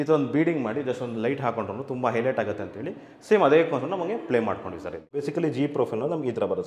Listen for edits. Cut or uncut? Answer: cut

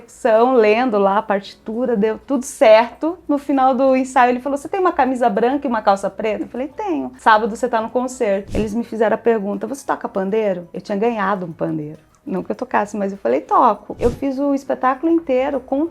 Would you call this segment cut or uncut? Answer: cut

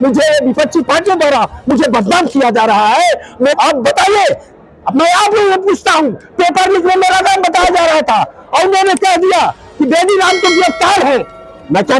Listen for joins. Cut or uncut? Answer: cut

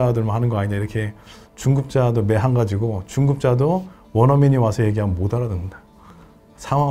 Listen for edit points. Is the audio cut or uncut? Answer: uncut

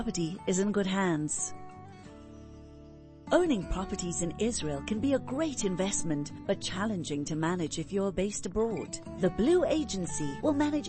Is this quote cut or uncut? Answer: cut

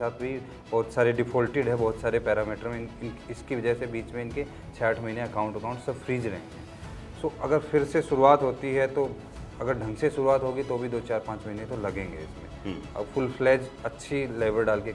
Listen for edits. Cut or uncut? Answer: uncut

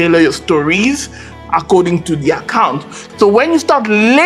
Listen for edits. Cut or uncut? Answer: cut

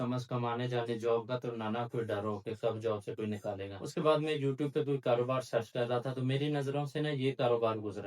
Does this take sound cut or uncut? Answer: cut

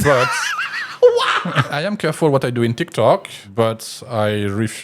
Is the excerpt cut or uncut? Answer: cut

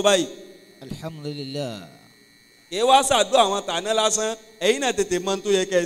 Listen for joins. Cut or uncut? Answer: uncut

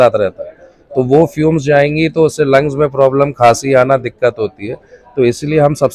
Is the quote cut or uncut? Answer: uncut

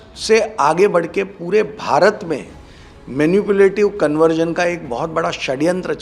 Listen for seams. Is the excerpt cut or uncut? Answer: uncut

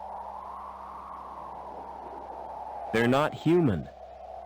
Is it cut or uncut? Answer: cut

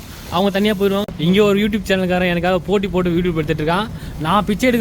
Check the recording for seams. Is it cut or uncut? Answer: cut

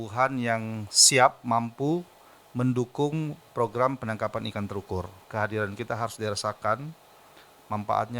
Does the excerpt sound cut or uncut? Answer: cut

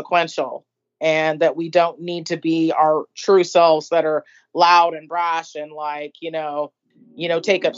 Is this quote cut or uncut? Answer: cut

